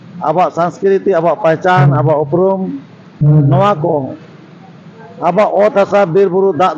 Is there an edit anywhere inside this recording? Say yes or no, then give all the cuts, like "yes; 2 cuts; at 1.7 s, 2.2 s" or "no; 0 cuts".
no; 0 cuts